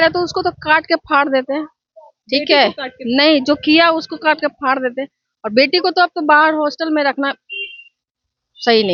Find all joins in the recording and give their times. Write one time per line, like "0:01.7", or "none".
none